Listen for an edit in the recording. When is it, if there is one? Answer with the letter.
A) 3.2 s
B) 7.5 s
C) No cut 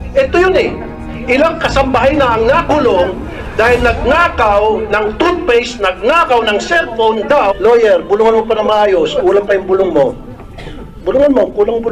B